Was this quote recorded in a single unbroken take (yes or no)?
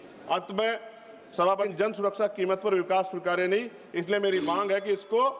no